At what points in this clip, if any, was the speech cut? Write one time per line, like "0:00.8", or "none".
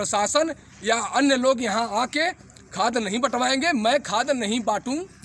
none